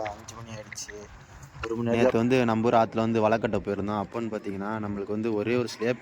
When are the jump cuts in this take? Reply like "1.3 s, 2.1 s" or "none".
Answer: 2.1 s